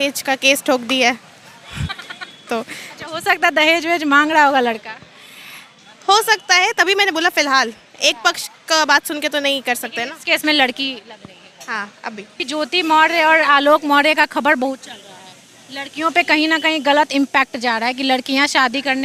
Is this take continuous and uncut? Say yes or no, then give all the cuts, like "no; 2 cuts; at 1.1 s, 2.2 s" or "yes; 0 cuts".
yes; 0 cuts